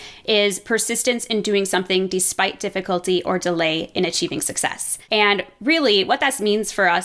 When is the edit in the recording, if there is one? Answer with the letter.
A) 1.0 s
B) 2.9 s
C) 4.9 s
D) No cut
C